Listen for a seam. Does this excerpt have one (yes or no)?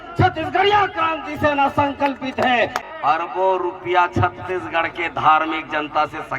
yes